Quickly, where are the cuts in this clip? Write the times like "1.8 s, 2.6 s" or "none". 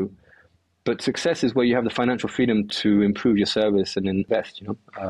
2.7 s, 4.3 s